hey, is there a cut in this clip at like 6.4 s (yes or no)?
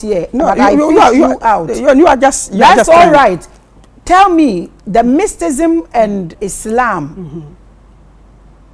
yes